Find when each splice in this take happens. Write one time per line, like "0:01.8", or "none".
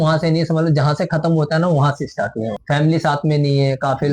0:02.5